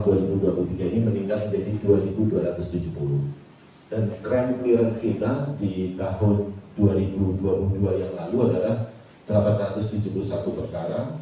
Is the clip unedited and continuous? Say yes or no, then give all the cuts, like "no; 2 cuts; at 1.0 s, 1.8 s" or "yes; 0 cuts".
yes; 0 cuts